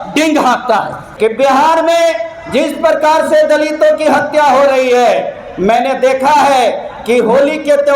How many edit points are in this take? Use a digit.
1